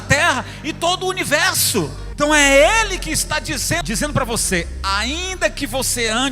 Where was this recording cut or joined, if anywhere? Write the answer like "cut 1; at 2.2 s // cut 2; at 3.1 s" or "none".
cut 1; at 2.0 s // cut 2; at 3.8 s